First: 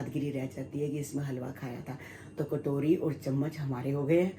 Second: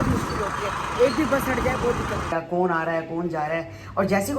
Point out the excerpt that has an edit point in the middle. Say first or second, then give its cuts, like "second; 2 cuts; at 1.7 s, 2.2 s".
second; 1 cut; at 2.3 s